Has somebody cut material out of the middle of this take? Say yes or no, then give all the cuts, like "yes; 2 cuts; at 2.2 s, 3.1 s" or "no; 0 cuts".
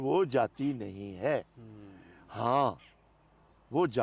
no; 0 cuts